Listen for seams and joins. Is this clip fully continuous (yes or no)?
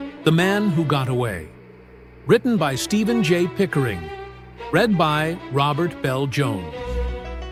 yes